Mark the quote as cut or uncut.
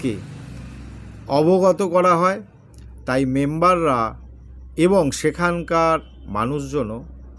uncut